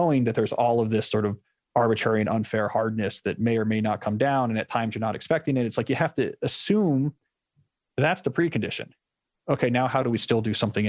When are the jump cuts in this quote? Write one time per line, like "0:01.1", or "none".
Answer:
none